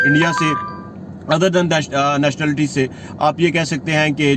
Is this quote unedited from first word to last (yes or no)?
yes